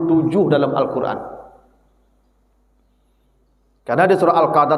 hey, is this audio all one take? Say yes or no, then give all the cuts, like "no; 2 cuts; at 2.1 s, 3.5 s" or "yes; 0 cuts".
yes; 0 cuts